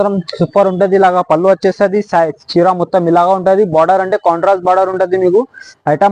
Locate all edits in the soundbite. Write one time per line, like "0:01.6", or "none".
none